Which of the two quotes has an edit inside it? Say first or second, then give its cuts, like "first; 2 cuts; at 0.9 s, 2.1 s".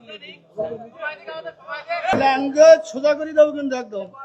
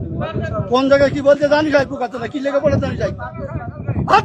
first; 1 cut; at 2.1 s